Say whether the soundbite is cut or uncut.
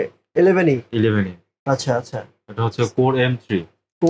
uncut